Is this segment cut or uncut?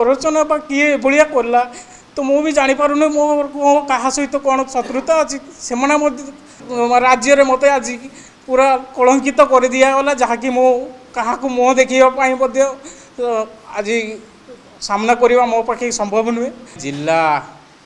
cut